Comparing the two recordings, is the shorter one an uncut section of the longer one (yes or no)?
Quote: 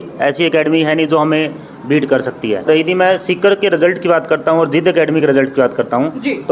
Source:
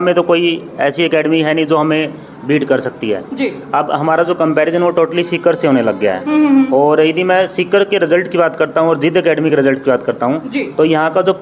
no